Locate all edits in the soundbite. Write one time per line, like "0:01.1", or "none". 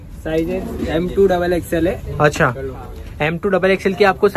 none